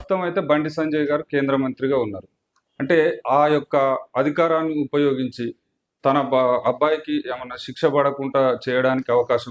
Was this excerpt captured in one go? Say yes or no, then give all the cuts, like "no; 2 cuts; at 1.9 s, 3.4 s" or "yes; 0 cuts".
yes; 0 cuts